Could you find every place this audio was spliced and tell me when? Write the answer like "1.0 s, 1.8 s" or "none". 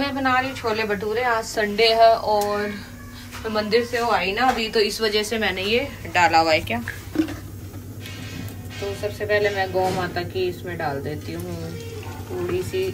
none